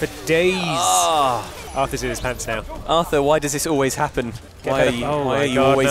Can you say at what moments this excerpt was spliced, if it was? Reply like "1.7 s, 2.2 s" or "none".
1.6 s, 2.8 s, 4.4 s

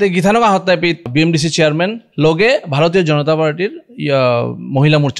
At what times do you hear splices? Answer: 1.1 s

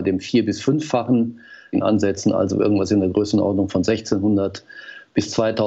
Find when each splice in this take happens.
1.8 s

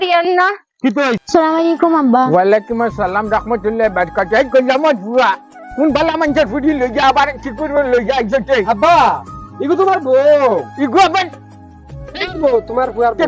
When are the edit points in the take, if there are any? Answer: 1.2 s

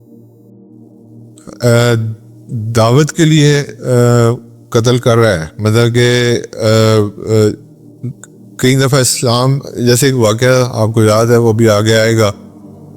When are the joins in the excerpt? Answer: 1.5 s

